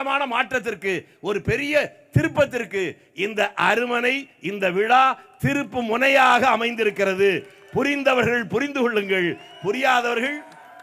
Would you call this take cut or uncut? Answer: uncut